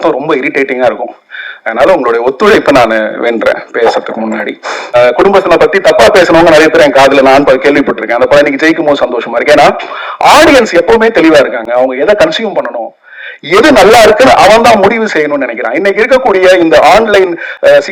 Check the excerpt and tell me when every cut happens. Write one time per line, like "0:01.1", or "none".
0:04.9